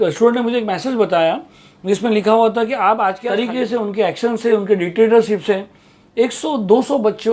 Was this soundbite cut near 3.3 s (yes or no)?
yes